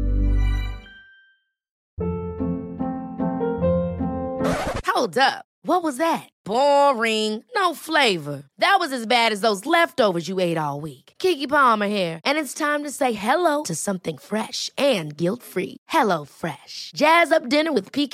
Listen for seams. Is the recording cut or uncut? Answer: cut